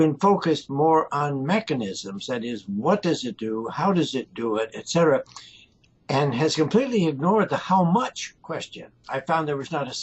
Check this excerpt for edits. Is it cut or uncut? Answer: cut